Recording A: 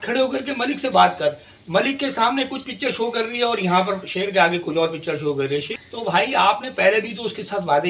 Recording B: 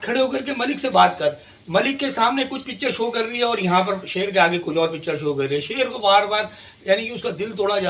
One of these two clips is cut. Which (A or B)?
A